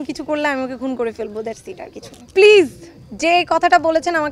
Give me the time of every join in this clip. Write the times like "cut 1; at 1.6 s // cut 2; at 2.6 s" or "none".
none